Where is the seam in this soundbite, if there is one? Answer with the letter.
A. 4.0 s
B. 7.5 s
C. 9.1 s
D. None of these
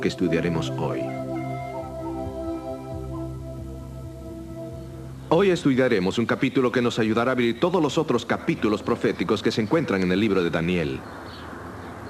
D